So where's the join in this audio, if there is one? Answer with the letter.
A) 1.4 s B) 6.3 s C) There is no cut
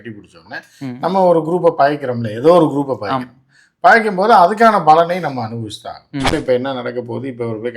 B